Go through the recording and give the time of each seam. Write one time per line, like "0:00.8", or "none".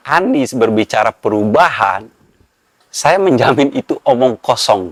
none